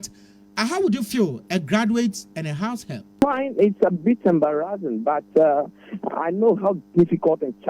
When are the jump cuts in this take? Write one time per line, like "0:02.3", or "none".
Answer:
0:03.2